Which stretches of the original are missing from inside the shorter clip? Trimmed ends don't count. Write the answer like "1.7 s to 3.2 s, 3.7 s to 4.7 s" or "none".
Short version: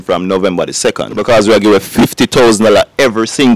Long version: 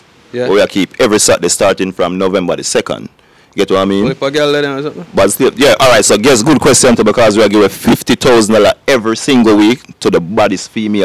3.1 s to 7.1 s